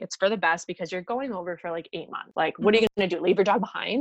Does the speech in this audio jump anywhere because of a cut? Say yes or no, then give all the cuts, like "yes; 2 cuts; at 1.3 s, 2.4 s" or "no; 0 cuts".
yes; 2 cuts; at 2.2 s, 2.9 s